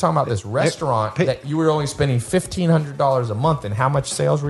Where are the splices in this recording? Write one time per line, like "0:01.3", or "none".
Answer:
none